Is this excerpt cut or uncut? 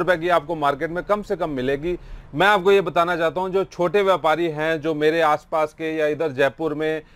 uncut